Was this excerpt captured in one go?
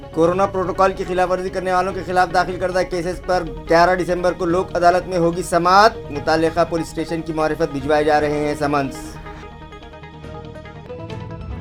yes; 0 cuts

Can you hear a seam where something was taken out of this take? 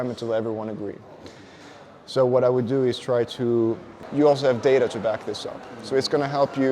yes; 1 cut; at 3.9 s

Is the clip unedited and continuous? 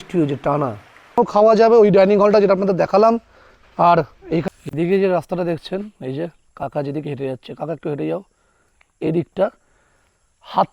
no; 2 cuts; at 1.2 s, 4.4 s

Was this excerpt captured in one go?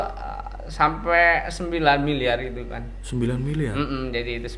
yes; 0 cuts

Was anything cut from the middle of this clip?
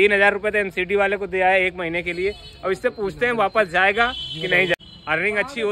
yes; 1 cut; at 4.7 s

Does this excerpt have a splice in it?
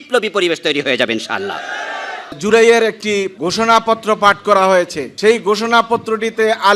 yes; 3 cuts; at 2.4 s, 3.3 s, 5.0 s

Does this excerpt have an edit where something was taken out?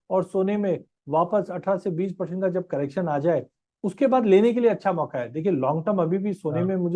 no; 0 cuts

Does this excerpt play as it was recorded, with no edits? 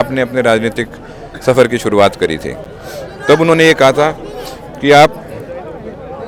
yes; 0 cuts

